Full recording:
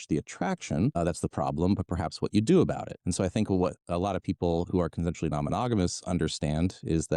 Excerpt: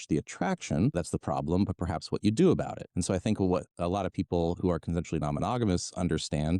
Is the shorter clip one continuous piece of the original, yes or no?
no